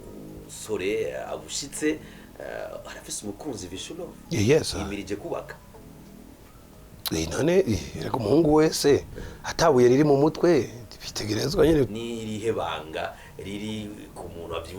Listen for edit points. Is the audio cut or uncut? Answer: cut